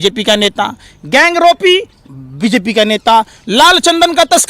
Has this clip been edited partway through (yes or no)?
no